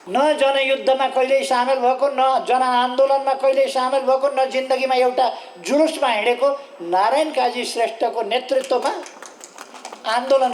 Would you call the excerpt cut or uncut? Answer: uncut